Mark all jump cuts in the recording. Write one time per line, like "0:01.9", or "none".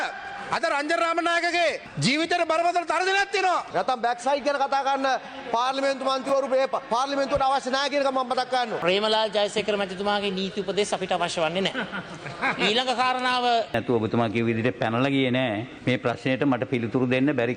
0:03.7
0:08.8
0:13.7
0:15.7